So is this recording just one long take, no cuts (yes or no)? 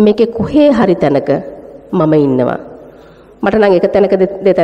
yes